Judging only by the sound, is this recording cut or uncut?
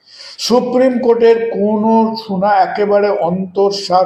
uncut